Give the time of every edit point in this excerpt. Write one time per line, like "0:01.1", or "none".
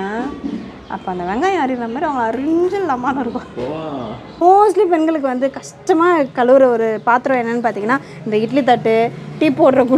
0:04.4